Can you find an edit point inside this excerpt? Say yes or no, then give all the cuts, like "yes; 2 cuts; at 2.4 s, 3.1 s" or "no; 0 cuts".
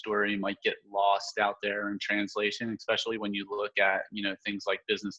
no; 0 cuts